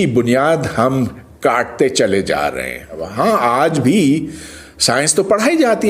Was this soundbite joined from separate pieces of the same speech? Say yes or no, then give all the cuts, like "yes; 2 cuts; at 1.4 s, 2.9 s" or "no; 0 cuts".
yes; 1 cut; at 3.1 s